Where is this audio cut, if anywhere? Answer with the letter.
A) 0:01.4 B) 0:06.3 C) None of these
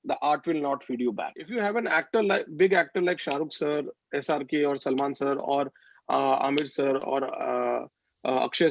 A